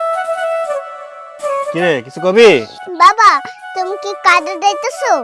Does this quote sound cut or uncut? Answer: cut